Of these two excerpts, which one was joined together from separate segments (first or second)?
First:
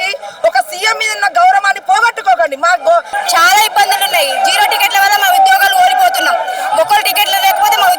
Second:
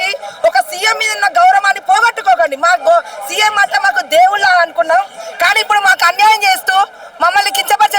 first